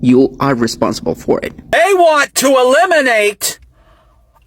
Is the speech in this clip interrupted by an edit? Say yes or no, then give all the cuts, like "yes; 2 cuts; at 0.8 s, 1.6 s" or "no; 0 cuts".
yes; 1 cut; at 1.7 s